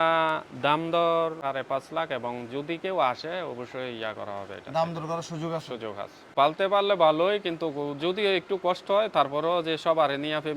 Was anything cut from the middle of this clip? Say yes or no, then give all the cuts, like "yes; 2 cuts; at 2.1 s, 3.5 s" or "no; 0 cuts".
yes; 2 cuts; at 1.4 s, 6.2 s